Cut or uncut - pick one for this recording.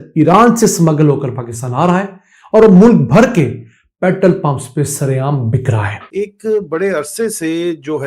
cut